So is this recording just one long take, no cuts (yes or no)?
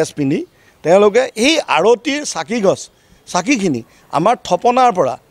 yes